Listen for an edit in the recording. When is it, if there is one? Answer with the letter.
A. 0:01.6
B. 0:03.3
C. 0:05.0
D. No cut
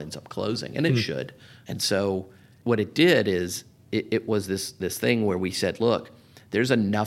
D